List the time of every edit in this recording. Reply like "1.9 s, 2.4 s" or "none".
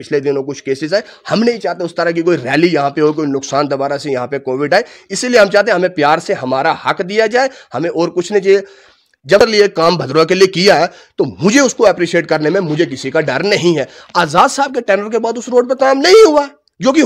9.4 s